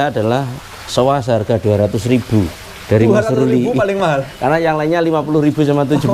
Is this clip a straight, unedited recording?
yes; 0 cuts

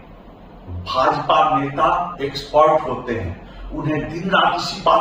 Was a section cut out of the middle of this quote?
no; 0 cuts

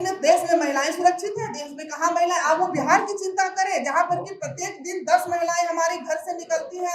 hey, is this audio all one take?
yes; 0 cuts

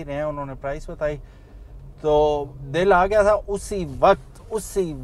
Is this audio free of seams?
yes; 0 cuts

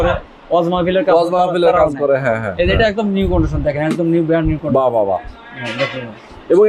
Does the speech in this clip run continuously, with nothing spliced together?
yes; 0 cuts

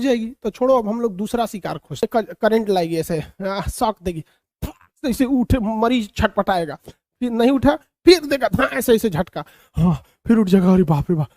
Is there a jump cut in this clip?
yes; 1 cut; at 2.0 s

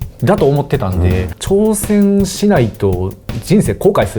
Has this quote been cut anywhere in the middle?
yes; 1 cut; at 1.3 s

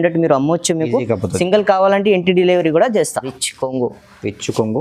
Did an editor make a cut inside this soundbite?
yes; 1 cut; at 3.3 s

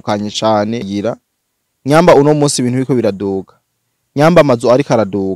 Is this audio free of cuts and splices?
no; 1 cut; at 0.9 s

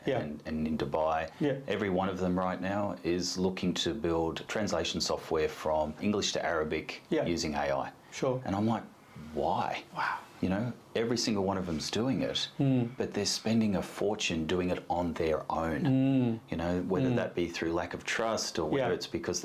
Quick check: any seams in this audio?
yes; 3 cuts; at 1.3 s, 4.4 s, 6.0 s

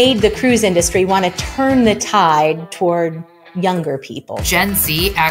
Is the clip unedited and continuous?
no; 1 cut; at 4.4 s

